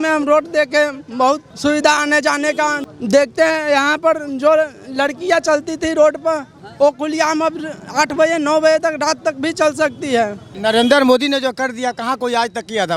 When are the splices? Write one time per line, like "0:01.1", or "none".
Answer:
0:01.5
0:02.8
0:10.5